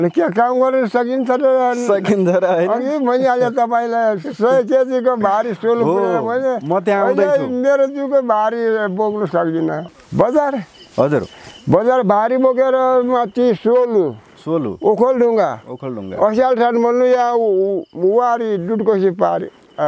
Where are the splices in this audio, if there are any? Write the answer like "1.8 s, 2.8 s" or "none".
9.8 s